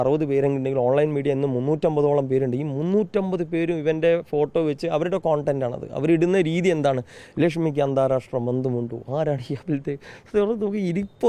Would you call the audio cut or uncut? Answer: uncut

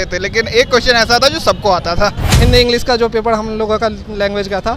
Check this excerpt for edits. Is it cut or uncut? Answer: cut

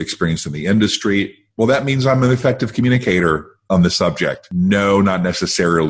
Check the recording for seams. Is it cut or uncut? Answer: cut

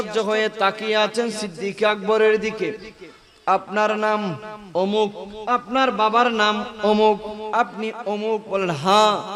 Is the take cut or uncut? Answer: uncut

